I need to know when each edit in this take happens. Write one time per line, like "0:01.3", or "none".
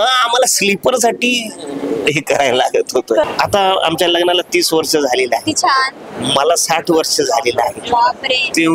0:03.2